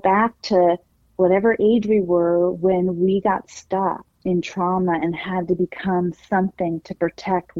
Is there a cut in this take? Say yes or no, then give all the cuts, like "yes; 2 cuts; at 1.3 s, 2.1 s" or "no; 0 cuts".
yes; 1 cut; at 4.1 s